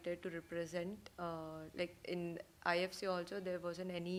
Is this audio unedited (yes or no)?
yes